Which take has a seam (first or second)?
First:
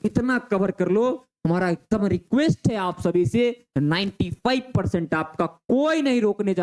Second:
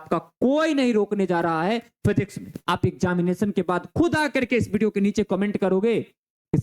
second